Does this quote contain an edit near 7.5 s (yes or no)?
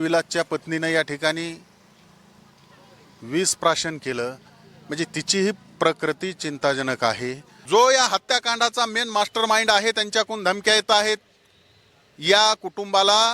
yes